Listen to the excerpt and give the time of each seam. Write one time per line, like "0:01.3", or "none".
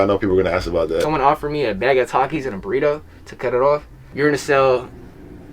0:01.1
0:04.0